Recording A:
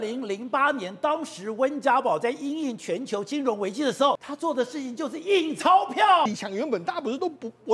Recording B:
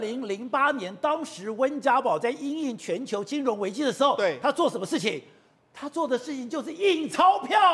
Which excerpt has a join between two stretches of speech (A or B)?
A